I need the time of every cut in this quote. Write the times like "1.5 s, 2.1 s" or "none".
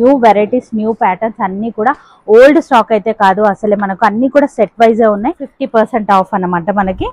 5.5 s

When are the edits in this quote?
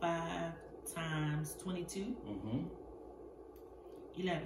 none

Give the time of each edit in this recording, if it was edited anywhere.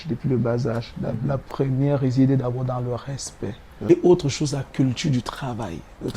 3.8 s

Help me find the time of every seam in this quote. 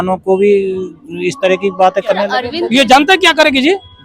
2.5 s

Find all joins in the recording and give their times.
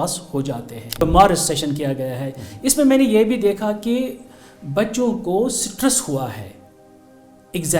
1.0 s

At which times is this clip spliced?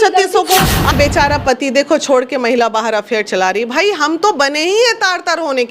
0.9 s

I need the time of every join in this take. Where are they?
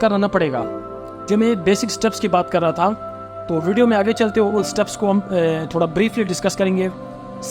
none

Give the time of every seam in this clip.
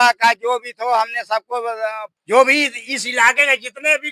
2.0 s

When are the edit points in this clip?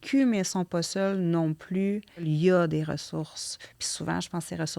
2.2 s

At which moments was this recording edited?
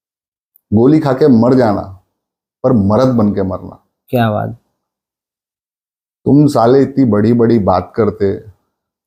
none

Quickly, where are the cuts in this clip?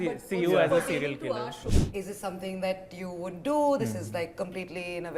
1.6 s

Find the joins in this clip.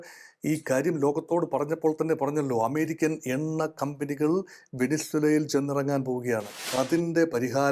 6.6 s

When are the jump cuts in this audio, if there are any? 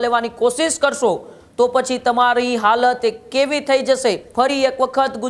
4.2 s

